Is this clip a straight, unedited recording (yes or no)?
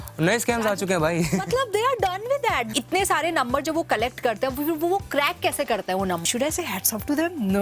no